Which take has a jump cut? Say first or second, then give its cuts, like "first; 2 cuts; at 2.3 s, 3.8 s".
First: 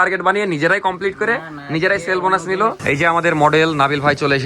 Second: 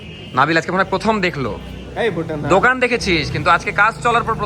first; 1 cut; at 2.9 s